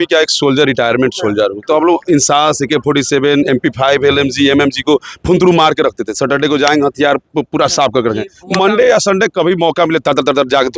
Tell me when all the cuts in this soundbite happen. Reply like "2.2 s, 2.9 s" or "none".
none